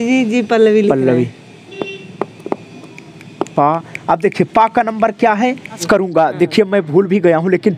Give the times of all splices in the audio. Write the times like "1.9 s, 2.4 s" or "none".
5.8 s